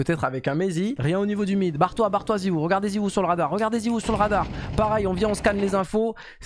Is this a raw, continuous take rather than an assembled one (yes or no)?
no